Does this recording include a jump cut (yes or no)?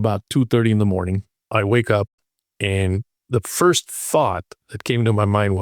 yes